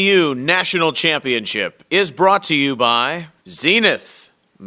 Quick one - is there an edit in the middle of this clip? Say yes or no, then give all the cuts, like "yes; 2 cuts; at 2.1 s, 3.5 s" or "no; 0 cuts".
yes; 1 cut; at 3.2 s